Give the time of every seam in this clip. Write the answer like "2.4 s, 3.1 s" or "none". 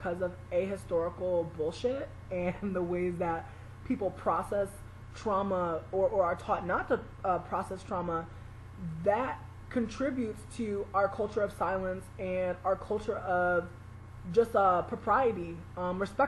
7.1 s